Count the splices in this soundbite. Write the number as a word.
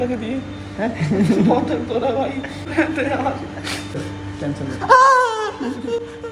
two